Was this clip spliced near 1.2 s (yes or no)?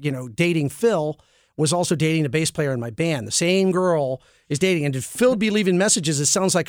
no